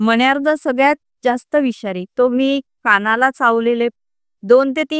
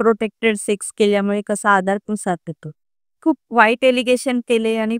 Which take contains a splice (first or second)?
second